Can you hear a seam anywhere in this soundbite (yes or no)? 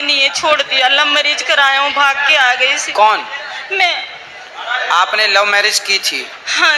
no